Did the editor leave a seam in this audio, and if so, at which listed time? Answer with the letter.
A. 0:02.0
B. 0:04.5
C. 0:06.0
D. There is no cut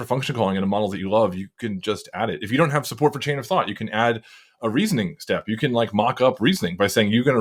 D